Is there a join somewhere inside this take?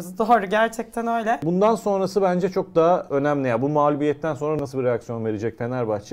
yes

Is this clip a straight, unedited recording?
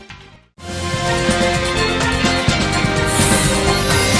no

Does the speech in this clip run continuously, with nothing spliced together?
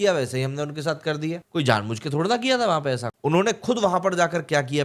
no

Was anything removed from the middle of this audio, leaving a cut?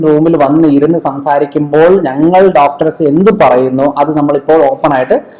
no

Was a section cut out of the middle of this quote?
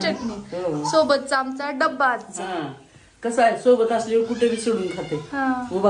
no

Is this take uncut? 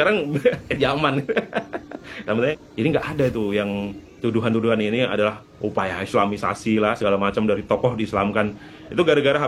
no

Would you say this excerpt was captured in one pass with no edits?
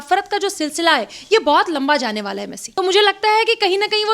no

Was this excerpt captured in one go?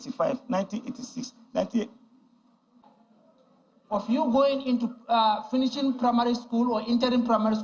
no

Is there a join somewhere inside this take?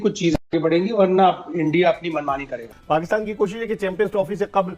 yes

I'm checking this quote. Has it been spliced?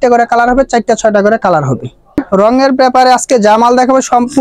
yes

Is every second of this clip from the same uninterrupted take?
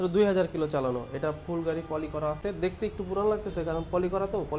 yes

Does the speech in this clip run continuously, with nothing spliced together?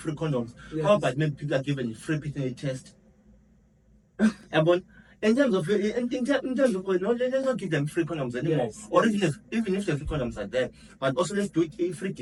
yes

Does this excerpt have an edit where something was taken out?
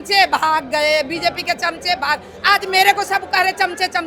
no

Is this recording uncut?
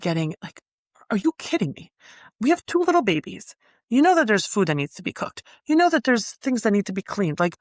yes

